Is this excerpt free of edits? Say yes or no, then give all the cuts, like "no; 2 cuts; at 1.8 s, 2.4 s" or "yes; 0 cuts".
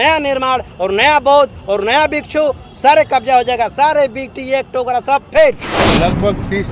no; 1 cut; at 5.7 s